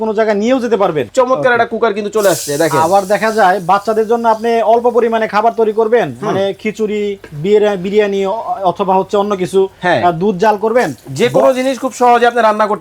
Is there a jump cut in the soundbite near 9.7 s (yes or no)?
no